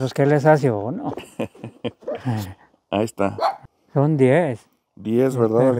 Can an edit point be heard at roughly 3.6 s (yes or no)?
yes